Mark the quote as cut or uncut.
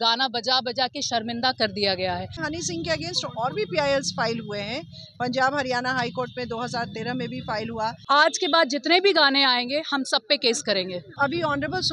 cut